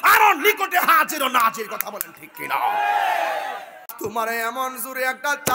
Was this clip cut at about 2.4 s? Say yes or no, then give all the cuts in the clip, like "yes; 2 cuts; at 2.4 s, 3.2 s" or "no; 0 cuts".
no; 1 cut; at 3.9 s